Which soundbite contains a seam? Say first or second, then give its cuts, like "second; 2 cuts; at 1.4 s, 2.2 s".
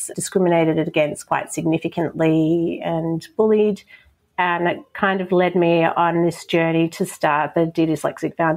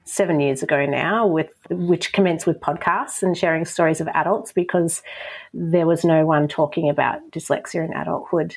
second; 1 cut; at 1.6 s